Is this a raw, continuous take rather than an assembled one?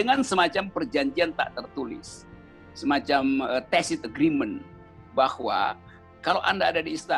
yes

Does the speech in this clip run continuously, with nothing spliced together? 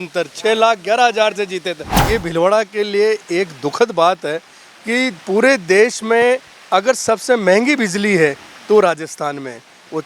no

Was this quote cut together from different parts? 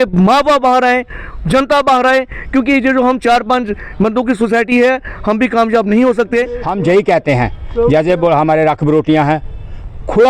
yes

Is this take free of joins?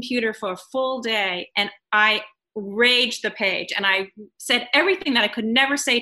no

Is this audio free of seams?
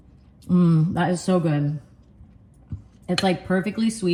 yes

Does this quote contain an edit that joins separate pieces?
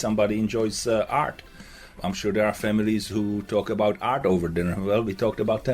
yes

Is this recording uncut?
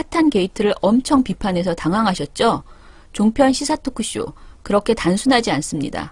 no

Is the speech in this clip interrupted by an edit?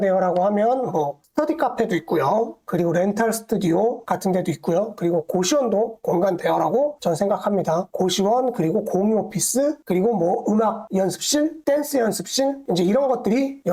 no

